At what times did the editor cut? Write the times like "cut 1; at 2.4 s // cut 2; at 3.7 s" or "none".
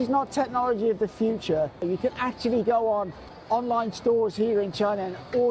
cut 1; at 1.8 s